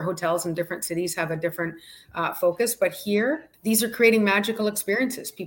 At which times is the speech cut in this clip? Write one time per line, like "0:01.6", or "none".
0:03.5